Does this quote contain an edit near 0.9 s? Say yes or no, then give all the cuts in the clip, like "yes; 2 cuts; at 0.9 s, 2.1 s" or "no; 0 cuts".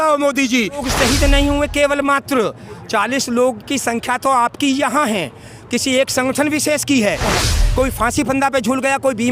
yes; 2 cuts; at 0.9 s, 7.3 s